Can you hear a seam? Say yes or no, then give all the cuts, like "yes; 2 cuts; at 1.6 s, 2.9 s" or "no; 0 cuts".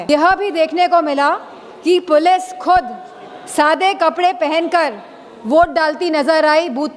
no; 0 cuts